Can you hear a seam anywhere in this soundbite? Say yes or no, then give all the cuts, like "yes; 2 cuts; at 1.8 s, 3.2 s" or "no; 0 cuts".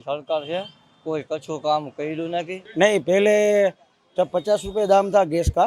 yes; 1 cut; at 2.6 s